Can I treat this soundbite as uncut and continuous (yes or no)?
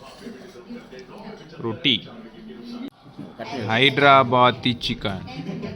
yes